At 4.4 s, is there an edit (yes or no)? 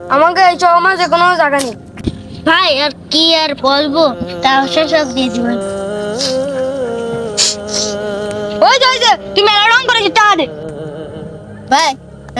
no